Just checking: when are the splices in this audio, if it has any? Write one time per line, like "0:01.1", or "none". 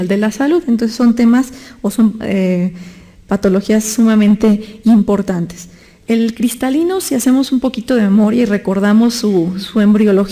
0:05.0